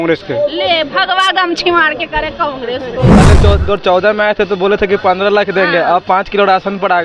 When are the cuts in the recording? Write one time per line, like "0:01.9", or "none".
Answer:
0:03.2